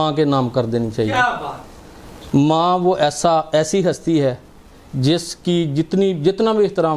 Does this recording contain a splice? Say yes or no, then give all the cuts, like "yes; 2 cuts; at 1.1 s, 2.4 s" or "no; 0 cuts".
no; 0 cuts